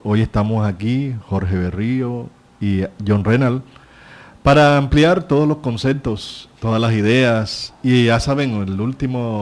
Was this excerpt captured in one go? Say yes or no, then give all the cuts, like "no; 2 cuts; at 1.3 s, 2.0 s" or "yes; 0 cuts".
yes; 0 cuts